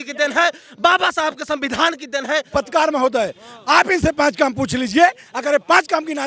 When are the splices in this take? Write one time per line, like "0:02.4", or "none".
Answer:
0:02.5